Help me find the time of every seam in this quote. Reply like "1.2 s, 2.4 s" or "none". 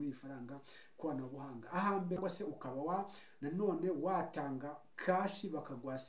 2.2 s